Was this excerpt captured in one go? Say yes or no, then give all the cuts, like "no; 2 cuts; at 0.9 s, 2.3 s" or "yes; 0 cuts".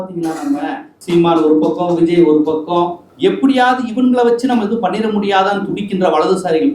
yes; 0 cuts